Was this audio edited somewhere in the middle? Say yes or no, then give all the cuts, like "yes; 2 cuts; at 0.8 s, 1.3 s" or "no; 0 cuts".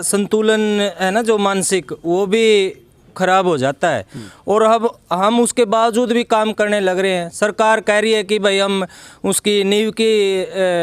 no; 0 cuts